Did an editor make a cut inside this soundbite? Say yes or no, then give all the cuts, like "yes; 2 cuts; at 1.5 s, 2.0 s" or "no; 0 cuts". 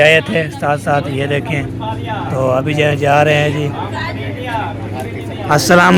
no; 0 cuts